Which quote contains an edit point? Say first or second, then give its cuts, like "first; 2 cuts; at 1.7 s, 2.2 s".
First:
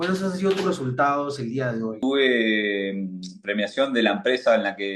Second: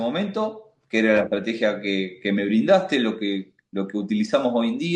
first; 1 cut; at 2.0 s